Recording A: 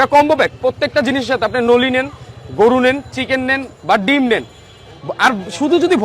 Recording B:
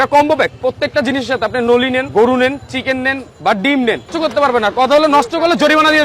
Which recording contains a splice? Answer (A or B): B